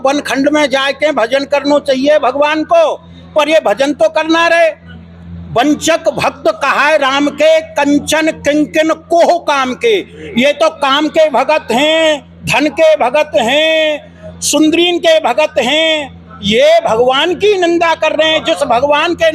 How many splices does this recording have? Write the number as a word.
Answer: zero